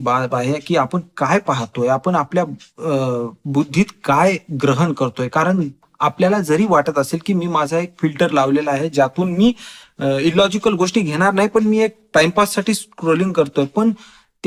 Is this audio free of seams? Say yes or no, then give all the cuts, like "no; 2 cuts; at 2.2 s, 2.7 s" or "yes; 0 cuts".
yes; 0 cuts